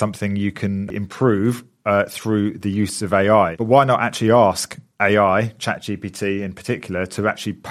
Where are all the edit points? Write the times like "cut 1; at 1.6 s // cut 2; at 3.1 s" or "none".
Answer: cut 1; at 0.9 s // cut 2; at 3.6 s